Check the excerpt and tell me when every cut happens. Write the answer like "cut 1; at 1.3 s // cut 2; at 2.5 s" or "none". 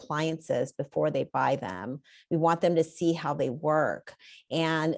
none